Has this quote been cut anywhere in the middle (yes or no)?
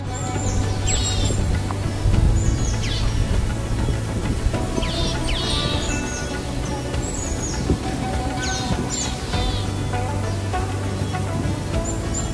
no